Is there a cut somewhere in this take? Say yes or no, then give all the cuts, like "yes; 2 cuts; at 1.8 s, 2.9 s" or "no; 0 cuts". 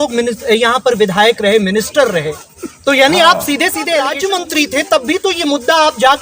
yes; 1 cut; at 4.1 s